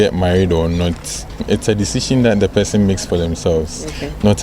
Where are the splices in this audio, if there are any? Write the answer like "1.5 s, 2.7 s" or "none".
1.4 s